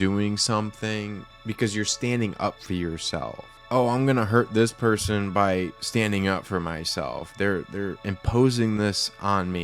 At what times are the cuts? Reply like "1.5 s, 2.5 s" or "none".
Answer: 1.3 s, 3.5 s

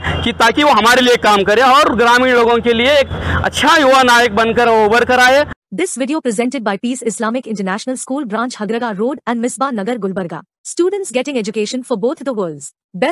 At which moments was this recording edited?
5.6 s

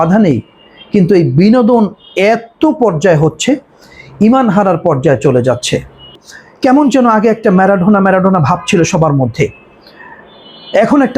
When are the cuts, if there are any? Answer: 6.1 s

